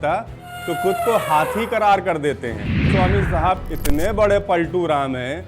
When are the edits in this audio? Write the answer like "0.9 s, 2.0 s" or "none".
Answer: 2.9 s